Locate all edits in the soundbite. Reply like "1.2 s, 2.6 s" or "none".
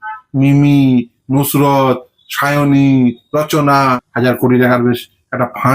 3.8 s

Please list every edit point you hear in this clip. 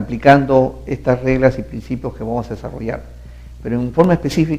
1.8 s

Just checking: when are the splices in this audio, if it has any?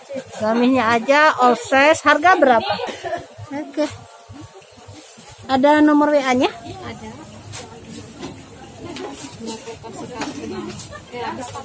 2.9 s

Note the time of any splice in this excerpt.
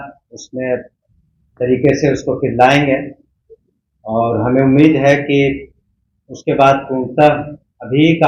none

